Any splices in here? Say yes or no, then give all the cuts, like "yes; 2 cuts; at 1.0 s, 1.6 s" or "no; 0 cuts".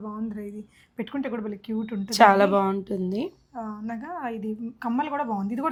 no; 0 cuts